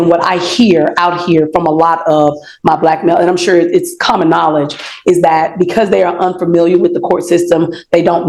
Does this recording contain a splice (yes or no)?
no